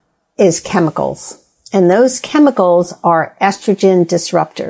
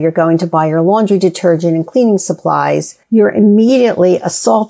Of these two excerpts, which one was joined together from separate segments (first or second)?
second